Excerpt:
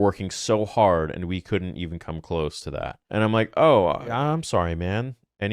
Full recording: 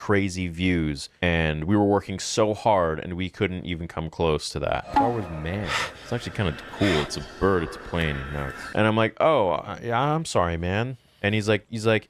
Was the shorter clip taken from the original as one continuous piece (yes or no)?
no